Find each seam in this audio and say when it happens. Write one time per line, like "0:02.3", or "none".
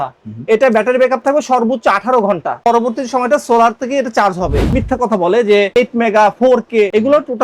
0:02.6
0:04.6
0:05.7